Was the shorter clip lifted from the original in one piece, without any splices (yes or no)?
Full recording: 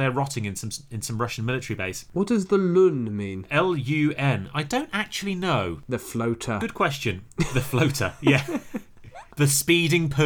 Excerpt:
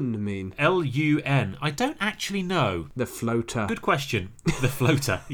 yes